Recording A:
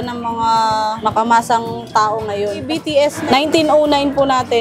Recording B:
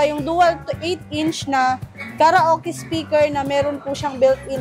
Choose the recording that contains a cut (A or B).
A